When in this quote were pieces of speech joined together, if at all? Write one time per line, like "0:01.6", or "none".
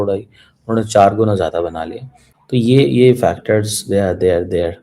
0:02.3

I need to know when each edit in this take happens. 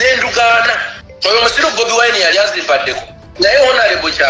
0:03.2

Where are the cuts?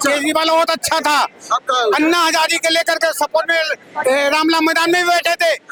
none

